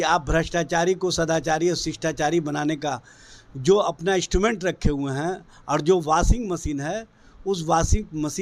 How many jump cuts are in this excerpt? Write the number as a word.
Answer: zero